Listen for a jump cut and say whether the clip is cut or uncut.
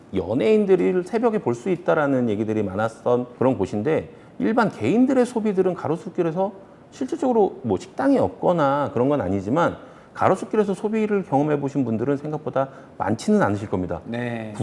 uncut